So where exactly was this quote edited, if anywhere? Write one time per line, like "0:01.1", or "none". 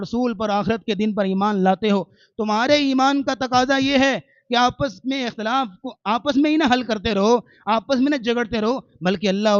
none

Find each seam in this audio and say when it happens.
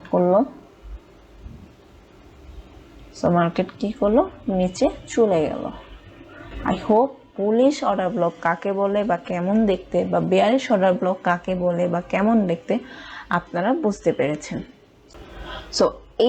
none

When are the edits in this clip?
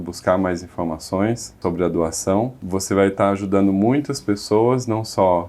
0:01.6
0:02.6

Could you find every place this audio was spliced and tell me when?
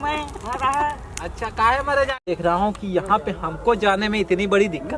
0:02.1

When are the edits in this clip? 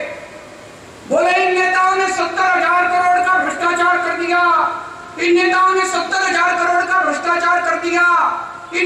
none

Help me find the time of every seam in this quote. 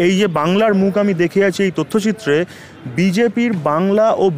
none

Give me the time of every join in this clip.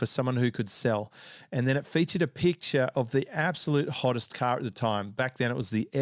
none

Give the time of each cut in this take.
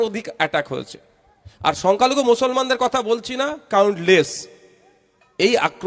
none

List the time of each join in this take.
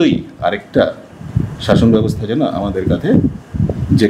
none

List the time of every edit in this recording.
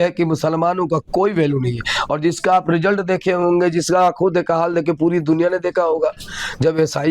none

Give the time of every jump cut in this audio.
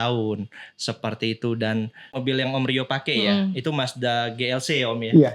0:02.2

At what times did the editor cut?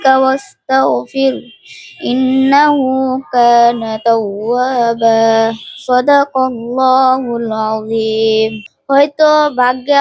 0:08.7

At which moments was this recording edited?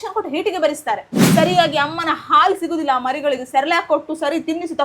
0:01.2

